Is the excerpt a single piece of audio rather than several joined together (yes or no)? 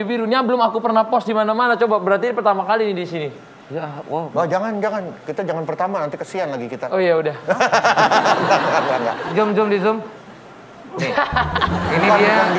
no